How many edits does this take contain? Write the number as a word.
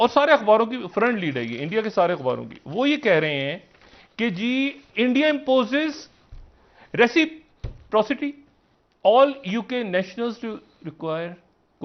zero